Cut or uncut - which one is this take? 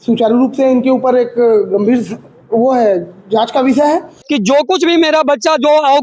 cut